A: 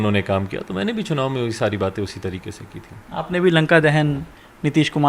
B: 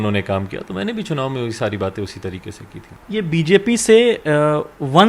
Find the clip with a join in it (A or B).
B